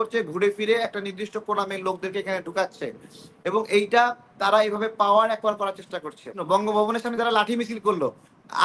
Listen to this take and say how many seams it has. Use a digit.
1